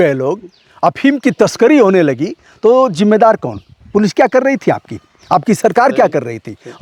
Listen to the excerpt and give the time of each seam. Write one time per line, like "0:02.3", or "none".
none